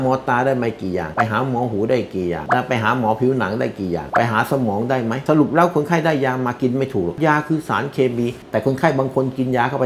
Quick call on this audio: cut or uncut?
uncut